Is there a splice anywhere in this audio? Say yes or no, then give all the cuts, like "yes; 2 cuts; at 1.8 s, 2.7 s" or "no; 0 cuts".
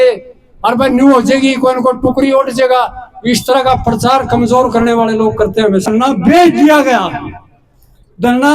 yes; 1 cut; at 5.9 s